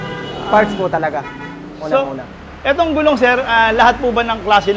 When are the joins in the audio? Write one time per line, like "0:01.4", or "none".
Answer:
none

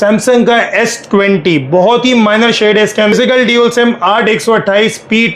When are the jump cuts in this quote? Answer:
0:03.1

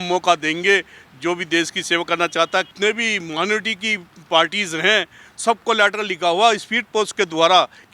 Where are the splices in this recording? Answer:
0:02.7

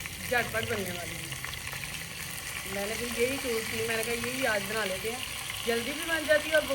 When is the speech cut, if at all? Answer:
none

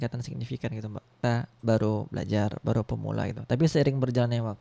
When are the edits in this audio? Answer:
0:01.2

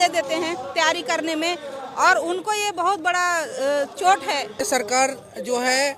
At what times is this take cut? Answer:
0:04.6

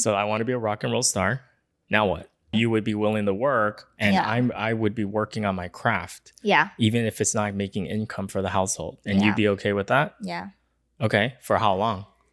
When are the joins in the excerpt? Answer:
0:02.5

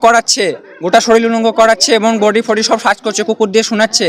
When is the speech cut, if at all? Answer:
none

